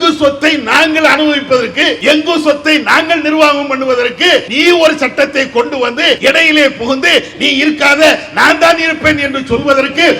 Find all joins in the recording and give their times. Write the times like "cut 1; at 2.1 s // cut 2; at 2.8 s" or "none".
cut 1; at 2.0 s // cut 2; at 4.5 s // cut 3; at 6.2 s